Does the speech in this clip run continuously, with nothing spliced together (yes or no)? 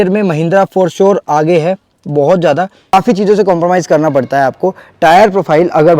no